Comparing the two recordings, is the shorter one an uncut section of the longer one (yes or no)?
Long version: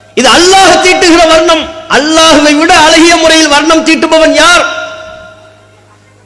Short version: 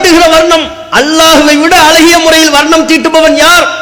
yes